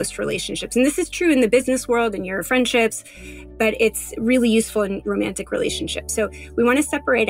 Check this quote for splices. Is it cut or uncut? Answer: uncut